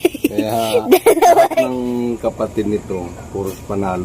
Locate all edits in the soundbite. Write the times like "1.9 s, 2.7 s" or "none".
1.7 s